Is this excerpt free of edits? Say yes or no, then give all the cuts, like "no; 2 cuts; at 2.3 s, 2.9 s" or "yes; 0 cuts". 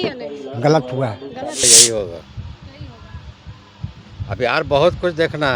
no; 1 cut; at 1.6 s